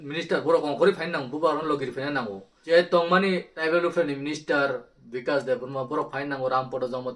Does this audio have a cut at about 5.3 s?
no; 2 cuts; at 2.5 s, 3.6 s

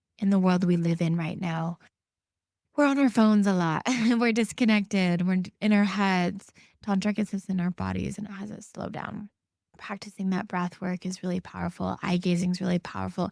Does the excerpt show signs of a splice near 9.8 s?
yes; 1 cut; at 9.8 s

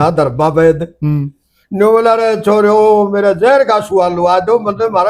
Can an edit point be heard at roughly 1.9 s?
no; 0 cuts

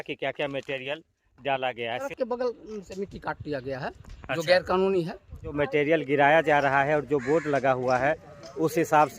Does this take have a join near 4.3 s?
no; 2 cuts; at 2.1 s, 5.6 s

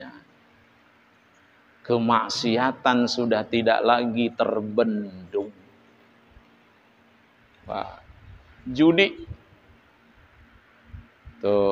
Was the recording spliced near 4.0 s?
no; 0 cuts

